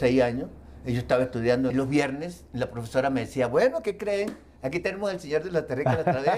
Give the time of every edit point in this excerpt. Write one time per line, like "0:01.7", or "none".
0:01.7